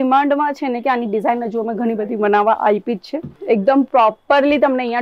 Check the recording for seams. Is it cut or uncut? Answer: cut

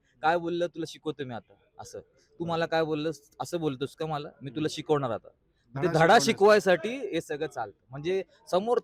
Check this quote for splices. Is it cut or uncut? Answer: uncut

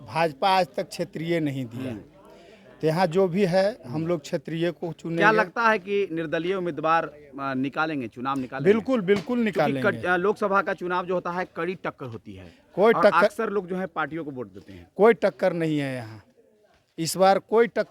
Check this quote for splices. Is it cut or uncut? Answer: uncut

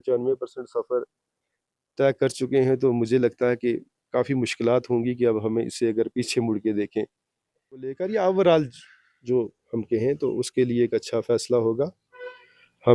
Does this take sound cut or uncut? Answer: cut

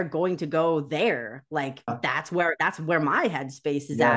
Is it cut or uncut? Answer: cut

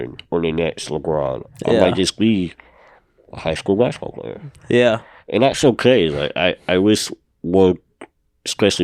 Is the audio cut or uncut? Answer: uncut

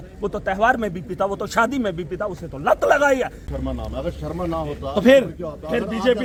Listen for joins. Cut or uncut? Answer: uncut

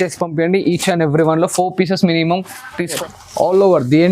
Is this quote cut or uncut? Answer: cut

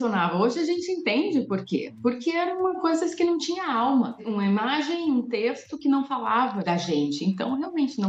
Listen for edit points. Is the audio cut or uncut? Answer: uncut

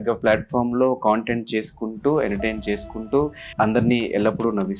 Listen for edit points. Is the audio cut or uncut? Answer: cut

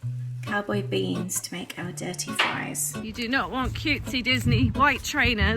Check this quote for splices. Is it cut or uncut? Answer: cut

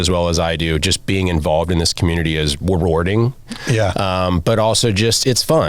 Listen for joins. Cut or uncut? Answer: cut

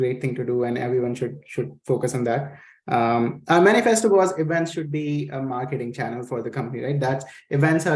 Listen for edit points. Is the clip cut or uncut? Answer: uncut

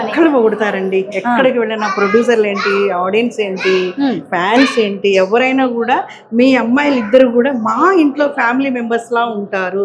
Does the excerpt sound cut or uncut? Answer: uncut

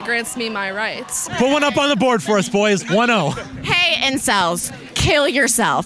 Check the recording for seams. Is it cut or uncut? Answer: cut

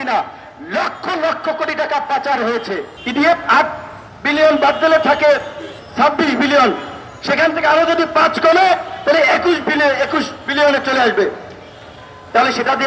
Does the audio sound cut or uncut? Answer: cut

